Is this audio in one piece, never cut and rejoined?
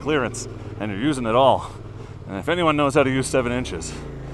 yes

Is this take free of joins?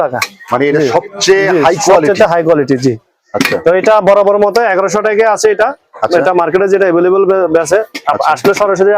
yes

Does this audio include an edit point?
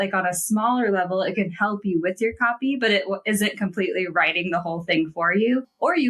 no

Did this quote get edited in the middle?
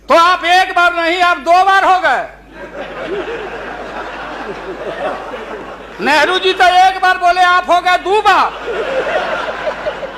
no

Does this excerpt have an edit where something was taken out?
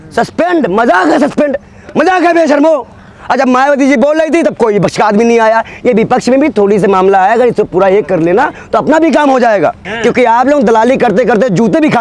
yes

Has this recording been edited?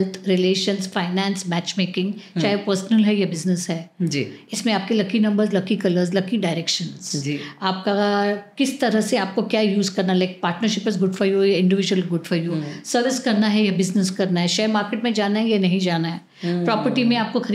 no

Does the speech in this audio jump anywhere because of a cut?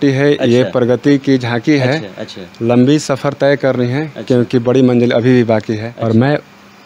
yes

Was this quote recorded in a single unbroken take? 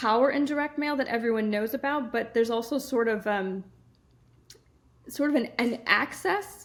yes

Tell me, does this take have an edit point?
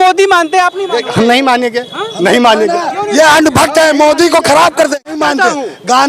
yes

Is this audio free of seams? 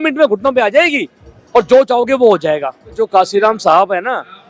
no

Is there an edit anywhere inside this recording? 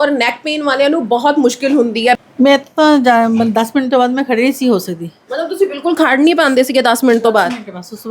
yes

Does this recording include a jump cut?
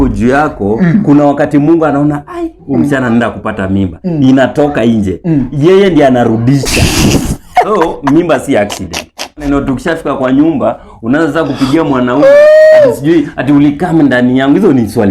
yes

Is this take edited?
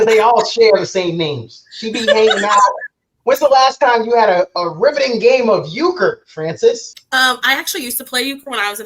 yes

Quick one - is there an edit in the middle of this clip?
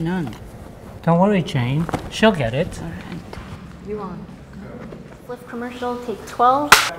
yes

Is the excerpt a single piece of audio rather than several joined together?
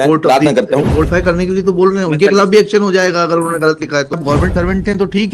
no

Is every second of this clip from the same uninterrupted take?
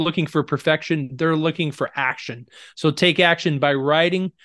yes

